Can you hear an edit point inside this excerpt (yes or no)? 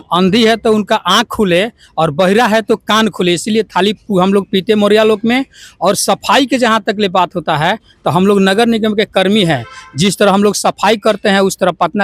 no